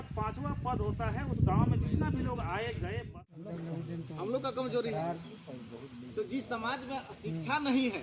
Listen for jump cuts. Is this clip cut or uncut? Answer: cut